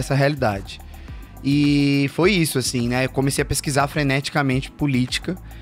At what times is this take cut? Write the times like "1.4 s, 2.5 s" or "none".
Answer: none